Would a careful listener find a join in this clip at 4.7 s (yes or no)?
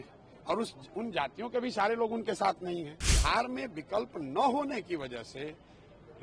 no